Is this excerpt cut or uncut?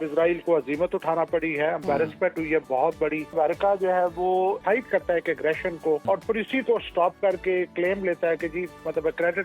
cut